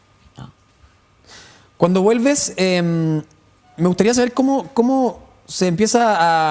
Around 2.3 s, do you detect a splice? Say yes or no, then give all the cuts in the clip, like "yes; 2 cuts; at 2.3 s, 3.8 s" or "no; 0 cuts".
yes; 1 cut; at 2.3 s